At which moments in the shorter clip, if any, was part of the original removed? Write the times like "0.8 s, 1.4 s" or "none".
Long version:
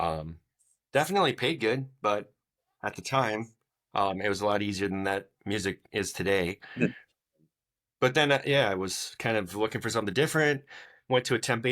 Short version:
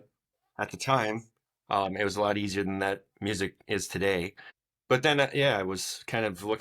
4.4 s